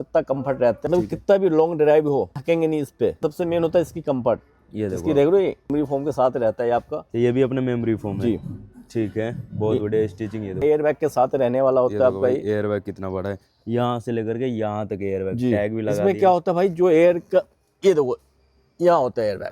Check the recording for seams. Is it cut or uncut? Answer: cut